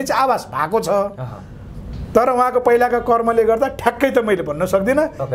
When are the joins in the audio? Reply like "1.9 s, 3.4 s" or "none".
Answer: none